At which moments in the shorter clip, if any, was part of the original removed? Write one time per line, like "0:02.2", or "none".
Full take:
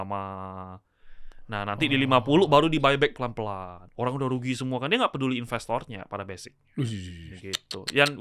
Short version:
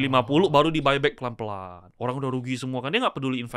none